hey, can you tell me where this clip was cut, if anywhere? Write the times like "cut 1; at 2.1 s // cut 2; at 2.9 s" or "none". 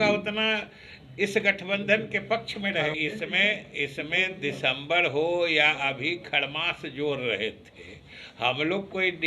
cut 1; at 2.9 s